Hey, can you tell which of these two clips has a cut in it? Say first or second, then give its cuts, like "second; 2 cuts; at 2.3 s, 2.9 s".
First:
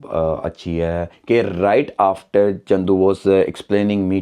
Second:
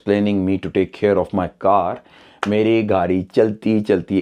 first; 1 cut; at 1.1 s